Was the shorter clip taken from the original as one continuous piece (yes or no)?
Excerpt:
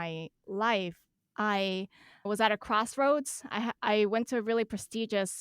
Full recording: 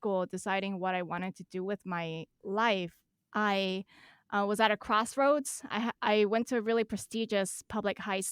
no